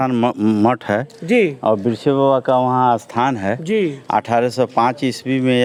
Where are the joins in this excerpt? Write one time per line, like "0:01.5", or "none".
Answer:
none